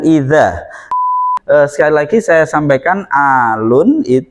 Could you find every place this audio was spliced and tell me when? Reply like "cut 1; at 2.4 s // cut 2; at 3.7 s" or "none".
cut 1; at 1.0 s